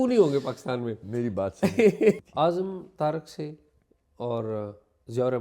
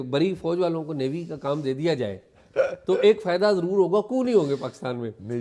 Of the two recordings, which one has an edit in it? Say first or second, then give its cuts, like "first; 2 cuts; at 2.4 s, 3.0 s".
first; 1 cut; at 2.2 s